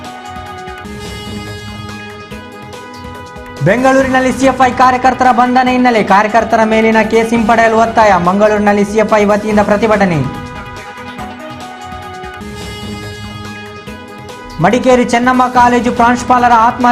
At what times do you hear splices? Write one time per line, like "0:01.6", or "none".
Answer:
none